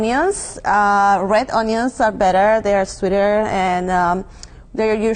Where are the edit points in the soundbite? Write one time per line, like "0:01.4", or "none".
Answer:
0:02.1